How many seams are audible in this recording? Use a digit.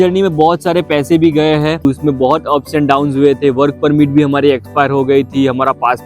1